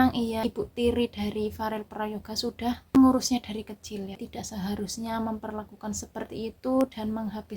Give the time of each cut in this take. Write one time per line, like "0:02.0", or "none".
0:03.0
0:04.2